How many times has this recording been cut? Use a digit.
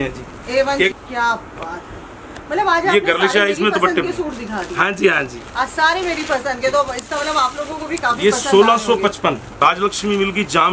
2